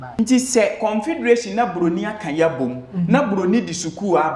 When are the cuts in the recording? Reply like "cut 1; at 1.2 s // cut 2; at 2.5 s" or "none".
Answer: none